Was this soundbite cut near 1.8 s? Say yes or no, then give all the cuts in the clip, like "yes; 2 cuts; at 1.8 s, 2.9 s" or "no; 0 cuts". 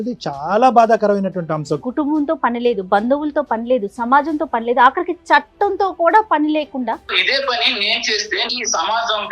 yes; 3 cuts; at 1.8 s, 7.1 s, 8.5 s